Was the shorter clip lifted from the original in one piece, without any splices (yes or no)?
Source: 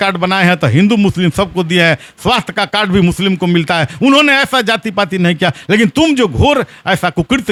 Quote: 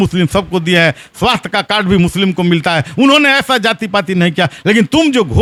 yes